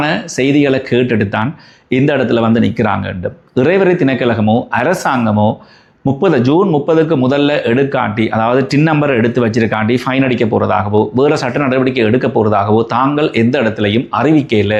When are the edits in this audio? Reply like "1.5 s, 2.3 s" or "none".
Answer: none

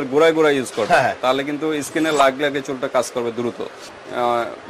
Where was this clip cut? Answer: 3.7 s

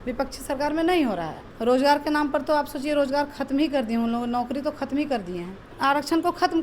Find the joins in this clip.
1.4 s, 5.7 s

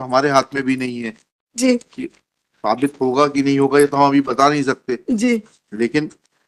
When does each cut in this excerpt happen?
none

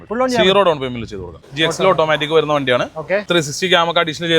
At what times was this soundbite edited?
1.4 s, 3.3 s

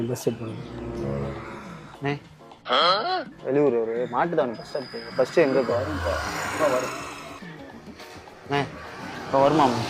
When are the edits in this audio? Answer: 1.8 s, 3.3 s

